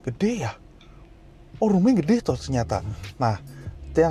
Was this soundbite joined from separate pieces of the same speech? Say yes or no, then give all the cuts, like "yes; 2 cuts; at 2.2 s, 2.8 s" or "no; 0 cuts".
no; 0 cuts